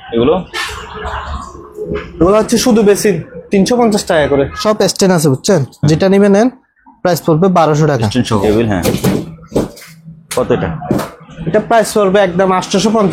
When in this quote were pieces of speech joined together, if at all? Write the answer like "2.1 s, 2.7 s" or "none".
4.6 s, 8.4 s